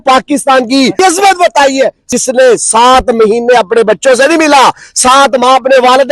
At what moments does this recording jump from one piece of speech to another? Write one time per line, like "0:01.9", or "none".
0:00.9
0:02.0